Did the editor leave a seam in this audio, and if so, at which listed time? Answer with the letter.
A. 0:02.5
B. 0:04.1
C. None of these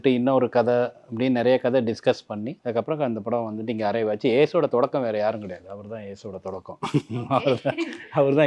A